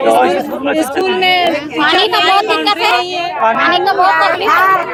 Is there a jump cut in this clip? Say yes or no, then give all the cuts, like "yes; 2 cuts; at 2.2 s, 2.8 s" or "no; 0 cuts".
no; 0 cuts